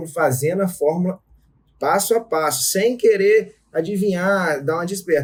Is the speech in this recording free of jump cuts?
yes; 0 cuts

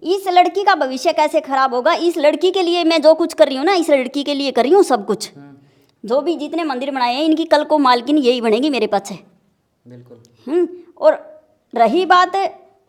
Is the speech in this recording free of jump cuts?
yes; 0 cuts

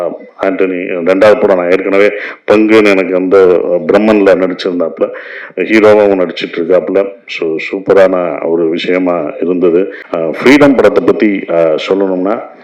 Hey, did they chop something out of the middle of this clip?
yes; 1 cut; at 10.0 s

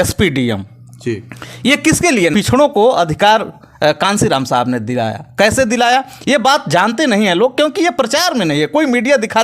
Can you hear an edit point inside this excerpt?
yes; 1 cut; at 2.3 s

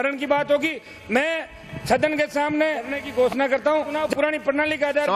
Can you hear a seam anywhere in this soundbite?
yes; 2 cuts; at 3.0 s, 4.0 s

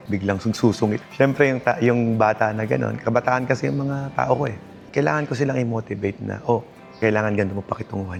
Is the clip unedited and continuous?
yes; 0 cuts

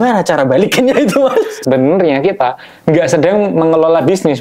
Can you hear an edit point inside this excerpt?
yes; 1 cut; at 1.6 s

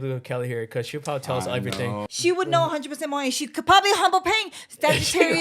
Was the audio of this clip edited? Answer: yes; 1 cut; at 2.1 s

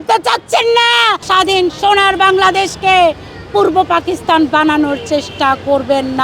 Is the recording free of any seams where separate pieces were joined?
no; 1 cut; at 1.2 s

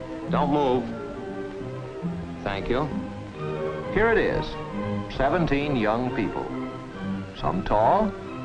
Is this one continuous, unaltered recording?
yes; 0 cuts

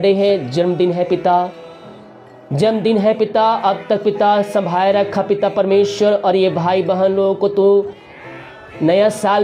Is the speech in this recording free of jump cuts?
yes; 0 cuts

